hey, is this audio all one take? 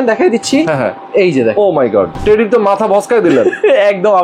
no; 1 cut; at 2.1 s

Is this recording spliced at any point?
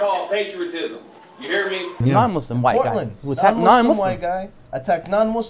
no; 0 cuts

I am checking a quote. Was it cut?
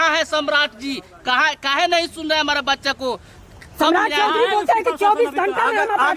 no; 0 cuts

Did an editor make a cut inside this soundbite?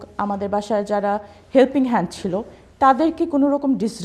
no; 0 cuts

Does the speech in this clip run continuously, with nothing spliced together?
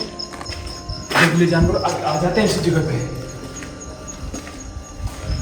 yes; 0 cuts

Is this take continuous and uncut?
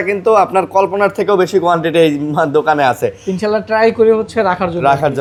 yes; 0 cuts

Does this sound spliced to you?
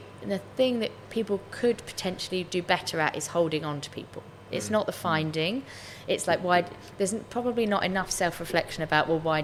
no; 0 cuts

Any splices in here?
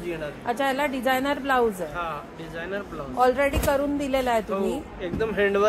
no; 0 cuts

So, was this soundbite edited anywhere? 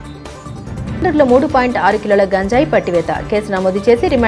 no; 0 cuts

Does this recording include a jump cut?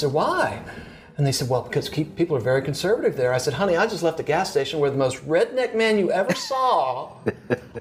no; 0 cuts

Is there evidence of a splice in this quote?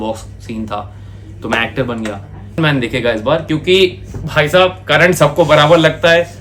yes; 1 cut; at 2.6 s

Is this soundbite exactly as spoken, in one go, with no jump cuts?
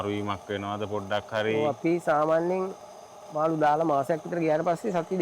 yes; 0 cuts

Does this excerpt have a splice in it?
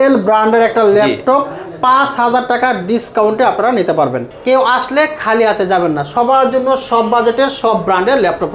yes; 1 cut; at 4.3 s

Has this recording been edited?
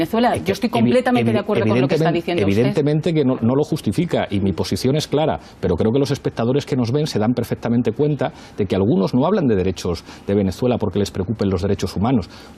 yes; 1 cut; at 9.4 s

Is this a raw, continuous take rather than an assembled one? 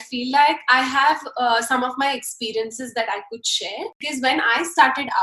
no; 1 cut; at 4.0 s

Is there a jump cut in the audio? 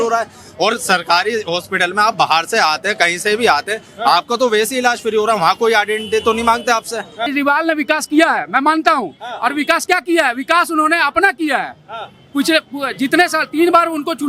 yes; 1 cut; at 7.2 s

